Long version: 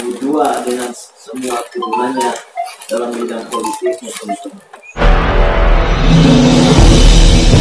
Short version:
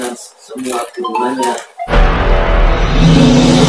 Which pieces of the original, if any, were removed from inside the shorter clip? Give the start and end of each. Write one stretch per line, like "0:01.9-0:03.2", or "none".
0:02.5-0:04.8